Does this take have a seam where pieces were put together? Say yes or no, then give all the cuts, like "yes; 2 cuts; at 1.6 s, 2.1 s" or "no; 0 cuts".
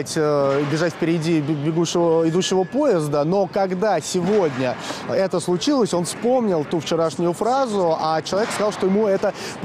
yes; 1 cut; at 5.6 s